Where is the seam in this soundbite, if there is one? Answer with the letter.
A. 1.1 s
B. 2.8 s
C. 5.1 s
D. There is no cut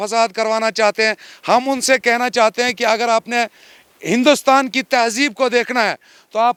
D